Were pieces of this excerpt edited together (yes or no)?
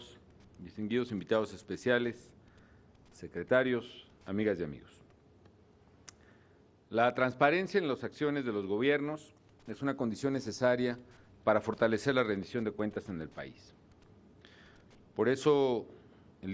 no